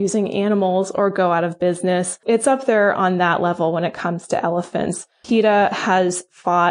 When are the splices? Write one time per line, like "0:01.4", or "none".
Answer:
0:02.2